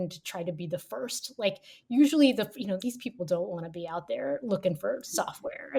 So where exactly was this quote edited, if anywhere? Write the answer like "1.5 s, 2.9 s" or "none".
none